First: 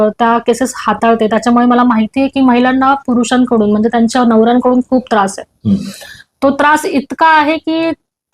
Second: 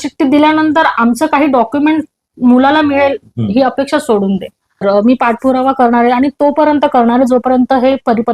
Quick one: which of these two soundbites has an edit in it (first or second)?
second